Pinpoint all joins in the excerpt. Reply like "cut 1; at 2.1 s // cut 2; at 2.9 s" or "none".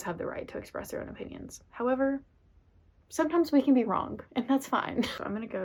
none